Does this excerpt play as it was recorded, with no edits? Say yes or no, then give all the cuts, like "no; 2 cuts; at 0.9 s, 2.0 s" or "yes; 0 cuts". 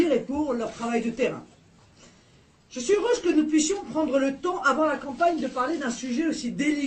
no; 1 cut; at 5.6 s